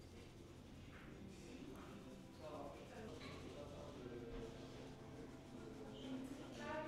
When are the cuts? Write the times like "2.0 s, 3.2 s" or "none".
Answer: 3.1 s

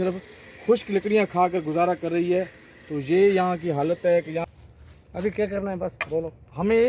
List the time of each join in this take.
4.4 s

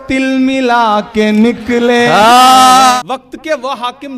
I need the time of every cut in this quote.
3.0 s

